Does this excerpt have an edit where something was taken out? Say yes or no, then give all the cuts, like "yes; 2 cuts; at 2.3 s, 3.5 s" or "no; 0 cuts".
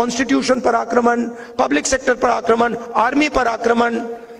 no; 0 cuts